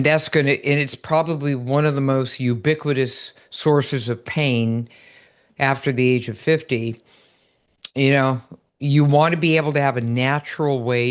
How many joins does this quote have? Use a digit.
0